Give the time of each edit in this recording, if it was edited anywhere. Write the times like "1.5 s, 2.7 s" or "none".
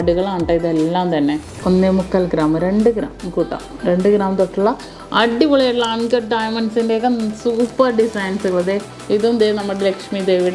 1.5 s, 8.9 s